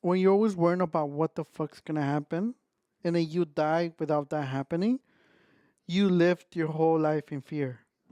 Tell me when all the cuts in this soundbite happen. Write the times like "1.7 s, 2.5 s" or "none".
none

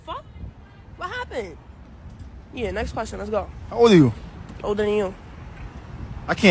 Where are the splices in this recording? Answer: none

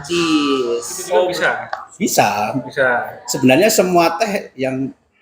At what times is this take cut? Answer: 1.4 s

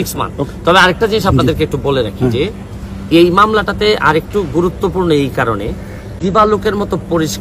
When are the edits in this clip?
6.2 s

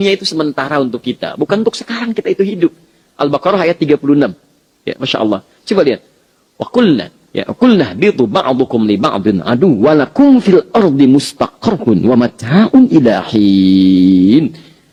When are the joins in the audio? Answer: none

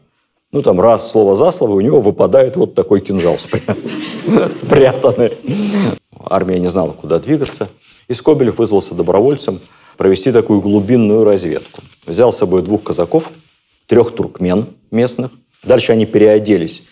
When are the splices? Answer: 6.0 s, 15.5 s

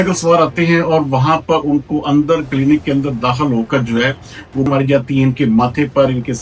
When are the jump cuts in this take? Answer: 4.7 s

